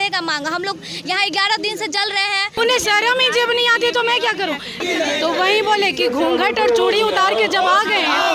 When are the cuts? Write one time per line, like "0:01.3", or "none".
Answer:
0:02.6
0:04.8